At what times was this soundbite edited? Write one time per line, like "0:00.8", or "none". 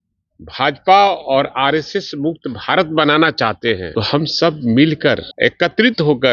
0:03.9
0:05.3